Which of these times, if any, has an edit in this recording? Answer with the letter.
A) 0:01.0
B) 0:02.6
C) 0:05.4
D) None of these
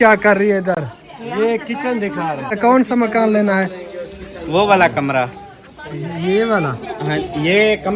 B